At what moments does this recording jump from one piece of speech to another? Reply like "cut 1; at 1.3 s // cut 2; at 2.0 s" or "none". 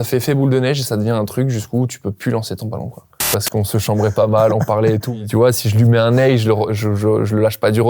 cut 1; at 3.3 s // cut 2; at 5.1 s